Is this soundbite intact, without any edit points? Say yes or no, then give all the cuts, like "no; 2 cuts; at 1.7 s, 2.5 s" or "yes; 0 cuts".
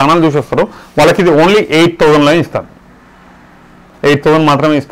yes; 0 cuts